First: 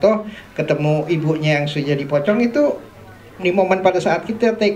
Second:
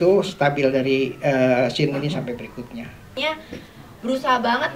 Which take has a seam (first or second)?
second